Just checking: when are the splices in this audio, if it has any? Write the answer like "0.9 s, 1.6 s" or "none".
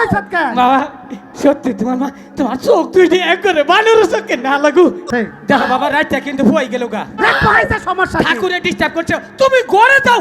5.0 s